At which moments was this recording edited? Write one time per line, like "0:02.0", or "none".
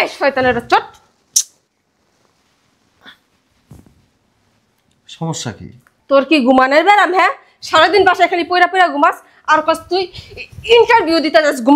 none